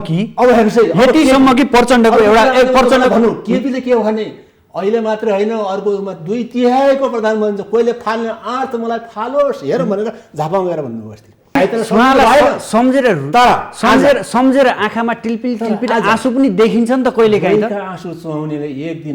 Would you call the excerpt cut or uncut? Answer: cut